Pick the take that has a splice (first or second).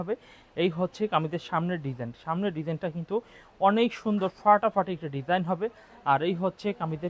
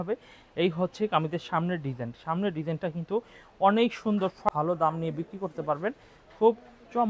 second